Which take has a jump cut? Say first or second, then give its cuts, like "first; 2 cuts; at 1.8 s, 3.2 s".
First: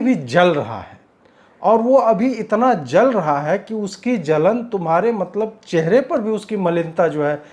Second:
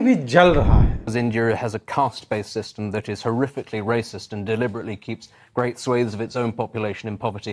second; 1 cut; at 1.0 s